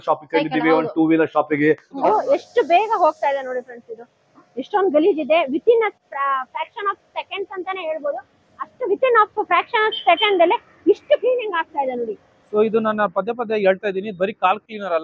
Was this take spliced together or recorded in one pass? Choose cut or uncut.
cut